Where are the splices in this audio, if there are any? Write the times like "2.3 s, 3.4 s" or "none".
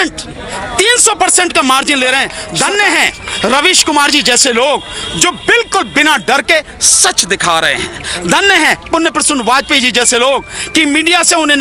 2.4 s